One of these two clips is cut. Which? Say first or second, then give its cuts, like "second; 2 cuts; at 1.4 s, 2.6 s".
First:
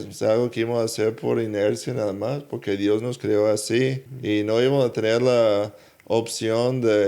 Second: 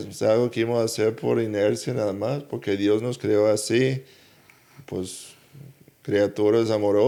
first; 1 cut; at 4.1 s